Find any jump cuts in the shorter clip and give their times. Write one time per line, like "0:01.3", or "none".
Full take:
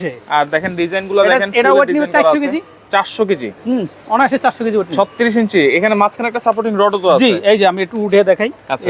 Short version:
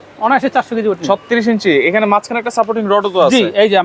none